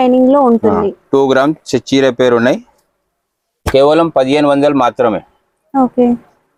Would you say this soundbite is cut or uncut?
uncut